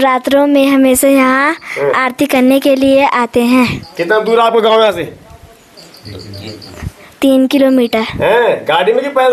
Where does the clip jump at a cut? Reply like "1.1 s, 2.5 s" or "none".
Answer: none